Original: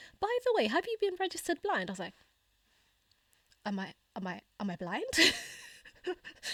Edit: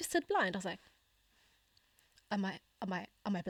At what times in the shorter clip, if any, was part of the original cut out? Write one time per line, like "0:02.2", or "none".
none